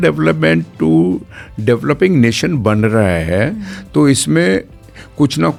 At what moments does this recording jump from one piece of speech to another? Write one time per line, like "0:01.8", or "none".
none

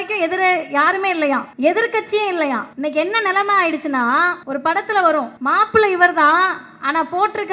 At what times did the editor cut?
0:01.5
0:02.7
0:04.4
0:05.3

